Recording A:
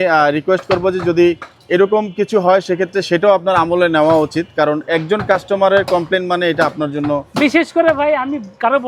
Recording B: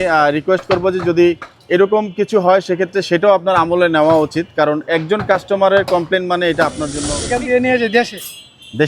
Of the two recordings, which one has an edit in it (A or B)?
B